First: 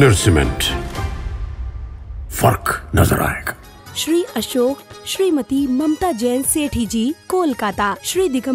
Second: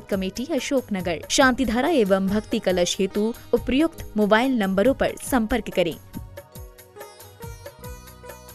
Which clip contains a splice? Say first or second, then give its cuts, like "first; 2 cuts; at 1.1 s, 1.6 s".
second; 1 cut; at 6.3 s